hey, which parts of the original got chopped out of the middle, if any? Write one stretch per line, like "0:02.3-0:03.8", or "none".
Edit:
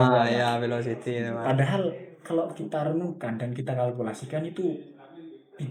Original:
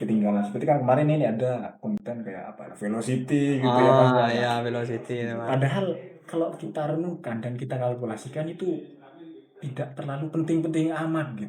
none